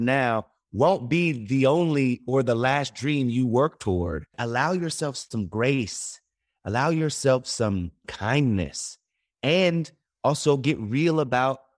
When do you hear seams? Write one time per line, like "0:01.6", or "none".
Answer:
0:04.3
0:08.1